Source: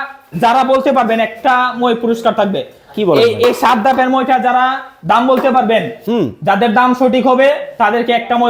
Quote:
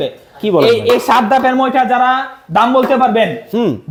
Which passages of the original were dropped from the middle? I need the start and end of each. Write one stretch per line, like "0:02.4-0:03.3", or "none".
none